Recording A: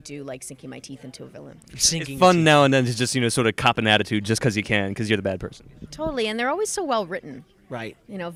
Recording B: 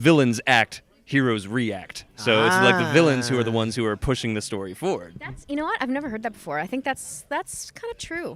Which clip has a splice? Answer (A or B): B